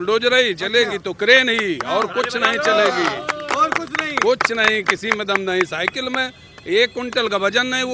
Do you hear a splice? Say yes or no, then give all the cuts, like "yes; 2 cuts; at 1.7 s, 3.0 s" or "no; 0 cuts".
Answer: no; 0 cuts